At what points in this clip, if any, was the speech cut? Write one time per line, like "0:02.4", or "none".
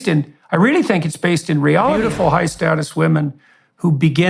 0:02.0